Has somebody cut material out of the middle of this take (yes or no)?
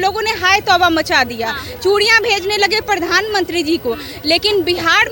no